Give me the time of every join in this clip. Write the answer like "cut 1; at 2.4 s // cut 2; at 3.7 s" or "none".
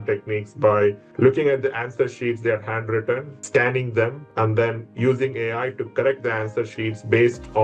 none